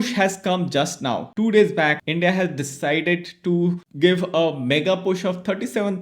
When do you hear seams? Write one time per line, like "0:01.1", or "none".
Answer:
0:01.3
0:02.0